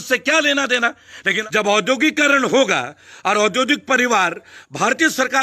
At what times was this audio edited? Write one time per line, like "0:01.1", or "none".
0:01.3